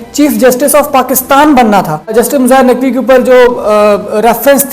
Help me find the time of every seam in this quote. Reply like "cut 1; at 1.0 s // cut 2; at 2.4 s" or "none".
cut 1; at 2.1 s